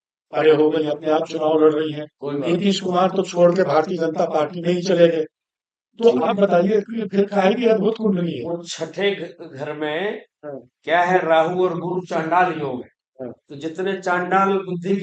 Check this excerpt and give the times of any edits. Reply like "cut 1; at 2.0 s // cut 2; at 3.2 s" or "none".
none

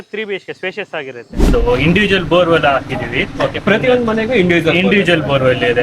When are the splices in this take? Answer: cut 1; at 1.5 s

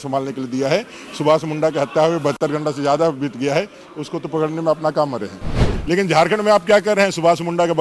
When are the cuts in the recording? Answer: cut 1; at 5.5 s

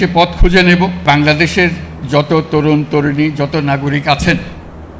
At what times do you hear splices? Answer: cut 1; at 1.0 s

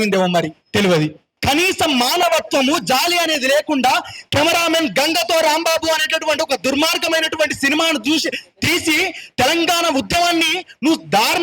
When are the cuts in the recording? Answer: cut 1; at 1.3 s

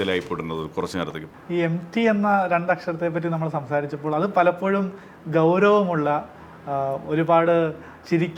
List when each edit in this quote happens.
cut 1; at 1.2 s

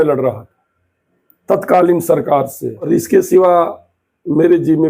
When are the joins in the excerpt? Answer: cut 1; at 2.9 s

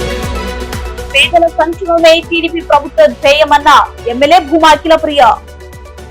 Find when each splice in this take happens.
cut 1; at 1.0 s

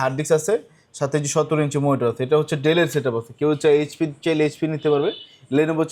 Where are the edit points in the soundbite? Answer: none

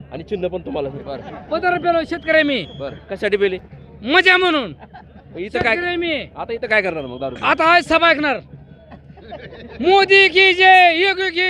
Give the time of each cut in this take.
cut 1; at 1.0 s

